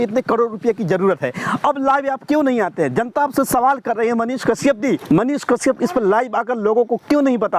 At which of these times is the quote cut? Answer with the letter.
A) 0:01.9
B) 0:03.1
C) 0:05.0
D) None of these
C